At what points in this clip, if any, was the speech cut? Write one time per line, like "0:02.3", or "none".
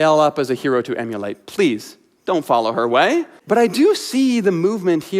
0:03.4